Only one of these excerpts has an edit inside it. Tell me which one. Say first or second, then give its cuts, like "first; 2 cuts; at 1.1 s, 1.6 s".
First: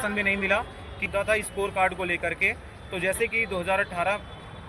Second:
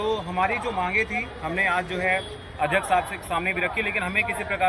first; 1 cut; at 1.0 s